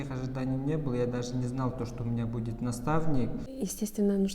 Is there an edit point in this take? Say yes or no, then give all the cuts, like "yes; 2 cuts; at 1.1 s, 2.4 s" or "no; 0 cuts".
yes; 1 cut; at 3.4 s